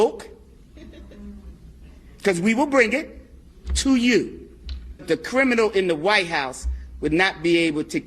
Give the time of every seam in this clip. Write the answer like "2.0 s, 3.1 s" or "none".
5.1 s